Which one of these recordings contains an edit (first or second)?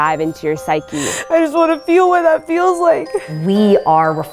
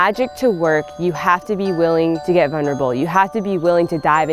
first